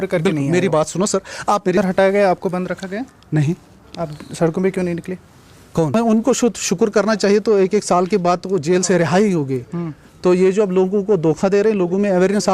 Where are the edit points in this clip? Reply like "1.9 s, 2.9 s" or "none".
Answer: 1.7 s, 5.9 s